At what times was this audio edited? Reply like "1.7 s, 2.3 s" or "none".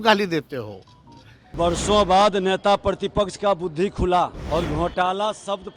1.5 s, 4.4 s